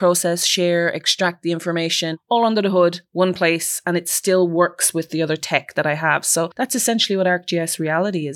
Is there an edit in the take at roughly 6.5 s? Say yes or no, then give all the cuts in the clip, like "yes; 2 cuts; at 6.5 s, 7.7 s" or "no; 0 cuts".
yes; 2 cuts; at 2.2 s, 6.5 s